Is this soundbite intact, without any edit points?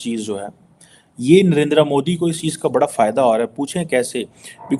yes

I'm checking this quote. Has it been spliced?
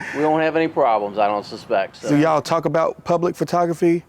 yes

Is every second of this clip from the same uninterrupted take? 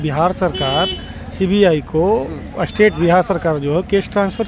yes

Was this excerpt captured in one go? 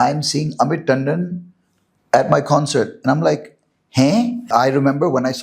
no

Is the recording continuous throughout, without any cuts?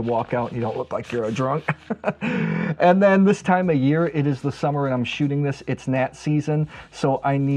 yes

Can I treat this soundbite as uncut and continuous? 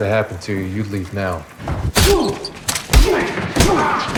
yes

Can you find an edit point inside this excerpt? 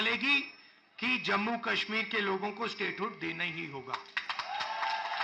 no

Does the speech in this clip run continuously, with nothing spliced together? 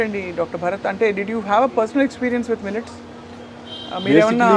yes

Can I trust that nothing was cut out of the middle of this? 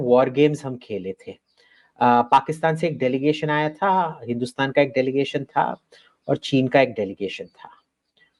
yes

